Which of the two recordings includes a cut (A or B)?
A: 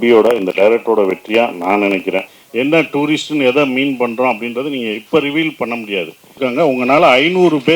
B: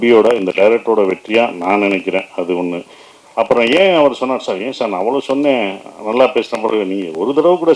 A